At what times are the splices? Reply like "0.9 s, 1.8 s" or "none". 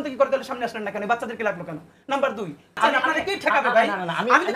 2.8 s